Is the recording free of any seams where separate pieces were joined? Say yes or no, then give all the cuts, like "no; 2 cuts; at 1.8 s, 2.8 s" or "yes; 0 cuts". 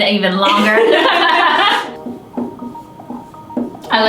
no; 1 cut; at 1.9 s